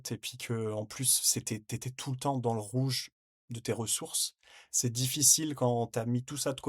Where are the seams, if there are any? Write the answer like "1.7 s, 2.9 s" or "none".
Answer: none